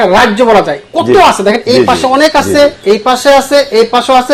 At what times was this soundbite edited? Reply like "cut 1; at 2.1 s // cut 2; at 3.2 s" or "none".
none